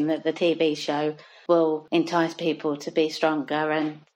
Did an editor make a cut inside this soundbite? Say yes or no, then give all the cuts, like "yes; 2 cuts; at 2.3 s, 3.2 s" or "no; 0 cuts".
yes; 2 cuts; at 1.3 s, 1.8 s